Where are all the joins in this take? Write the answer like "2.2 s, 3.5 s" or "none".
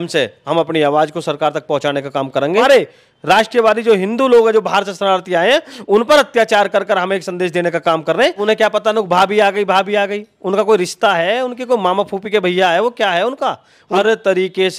2.6 s, 8.4 s, 13.8 s